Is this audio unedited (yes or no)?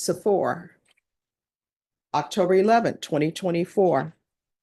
yes